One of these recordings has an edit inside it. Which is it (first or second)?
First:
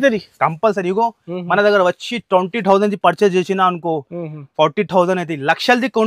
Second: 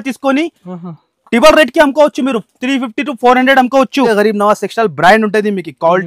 second